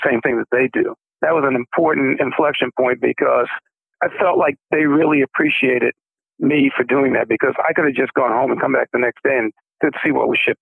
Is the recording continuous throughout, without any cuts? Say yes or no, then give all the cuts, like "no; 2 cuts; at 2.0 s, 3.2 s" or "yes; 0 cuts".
no; 2 cuts; at 1.0 s, 9.6 s